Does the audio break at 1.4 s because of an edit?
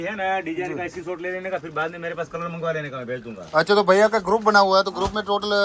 no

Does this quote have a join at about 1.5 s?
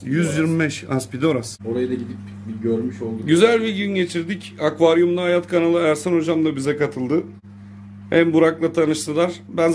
yes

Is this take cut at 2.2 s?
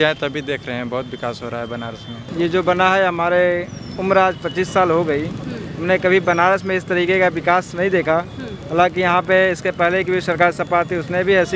yes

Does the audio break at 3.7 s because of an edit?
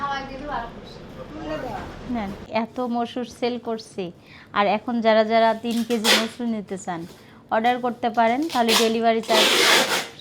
no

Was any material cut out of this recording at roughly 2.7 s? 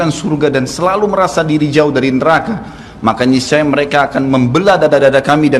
no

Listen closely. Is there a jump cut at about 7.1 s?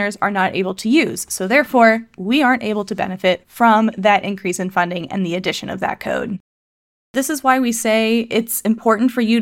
yes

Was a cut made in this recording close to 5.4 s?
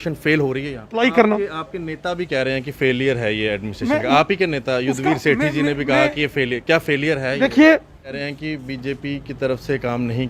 no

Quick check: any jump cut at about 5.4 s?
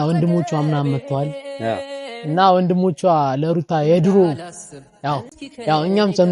yes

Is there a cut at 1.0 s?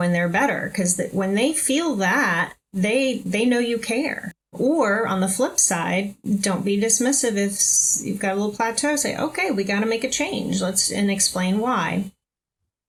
no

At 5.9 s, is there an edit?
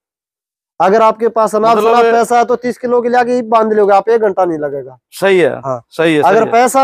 no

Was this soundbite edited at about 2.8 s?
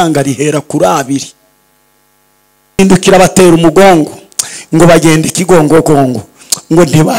yes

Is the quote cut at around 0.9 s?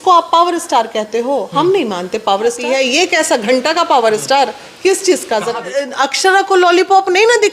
no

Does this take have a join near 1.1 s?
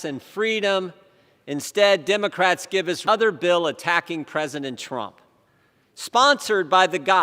no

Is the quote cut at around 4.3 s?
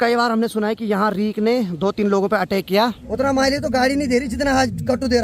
no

